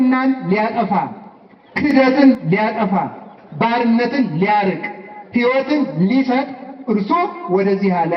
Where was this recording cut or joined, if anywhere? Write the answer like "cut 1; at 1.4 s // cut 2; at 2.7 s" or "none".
none